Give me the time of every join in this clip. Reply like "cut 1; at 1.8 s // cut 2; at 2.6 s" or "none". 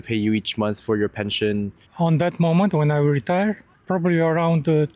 cut 1; at 1.8 s // cut 2; at 3.7 s